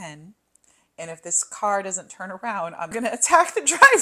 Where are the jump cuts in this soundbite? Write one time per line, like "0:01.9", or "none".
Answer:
0:02.9